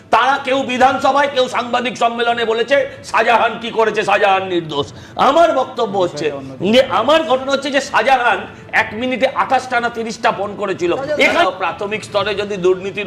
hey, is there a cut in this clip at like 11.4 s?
yes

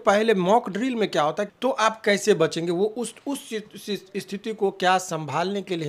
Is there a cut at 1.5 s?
yes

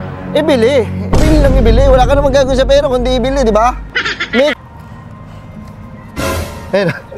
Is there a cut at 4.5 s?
yes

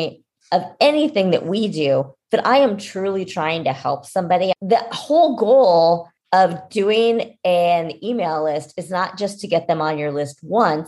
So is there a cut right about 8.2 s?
no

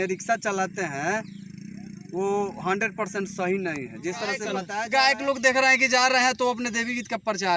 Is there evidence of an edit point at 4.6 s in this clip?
yes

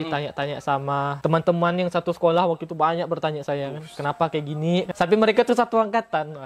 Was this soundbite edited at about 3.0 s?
no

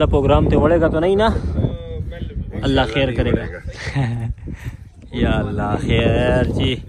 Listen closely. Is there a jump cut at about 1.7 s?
no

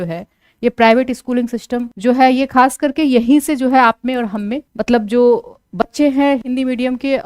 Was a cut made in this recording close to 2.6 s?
no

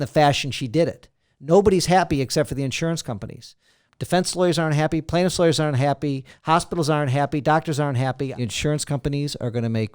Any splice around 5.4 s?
no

